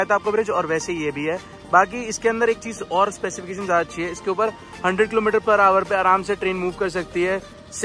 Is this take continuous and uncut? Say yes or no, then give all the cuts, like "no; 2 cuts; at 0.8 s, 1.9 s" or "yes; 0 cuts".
yes; 0 cuts